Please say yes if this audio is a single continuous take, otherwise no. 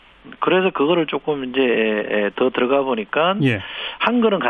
no